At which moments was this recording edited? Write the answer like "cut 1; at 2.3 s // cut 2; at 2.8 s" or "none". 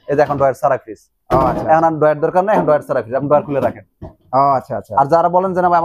none